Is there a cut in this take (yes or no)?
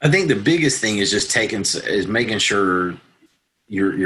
no